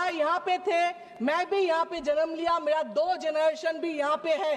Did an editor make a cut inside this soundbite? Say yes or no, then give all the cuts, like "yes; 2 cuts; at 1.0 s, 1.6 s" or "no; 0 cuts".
no; 0 cuts